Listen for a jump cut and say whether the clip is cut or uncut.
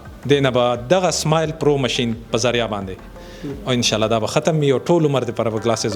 uncut